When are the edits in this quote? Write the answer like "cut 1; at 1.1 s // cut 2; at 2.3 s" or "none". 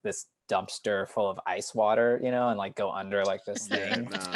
none